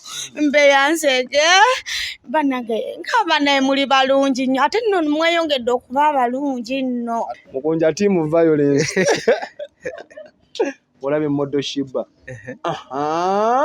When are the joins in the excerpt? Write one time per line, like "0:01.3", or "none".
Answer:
0:07.4